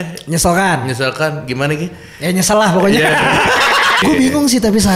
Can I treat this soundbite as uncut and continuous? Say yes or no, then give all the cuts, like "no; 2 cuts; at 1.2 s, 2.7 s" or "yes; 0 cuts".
no; 1 cut; at 4.0 s